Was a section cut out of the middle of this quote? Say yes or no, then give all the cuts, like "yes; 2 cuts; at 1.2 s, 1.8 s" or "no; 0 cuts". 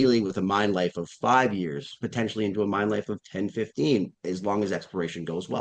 no; 0 cuts